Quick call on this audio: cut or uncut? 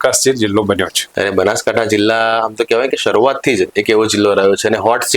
cut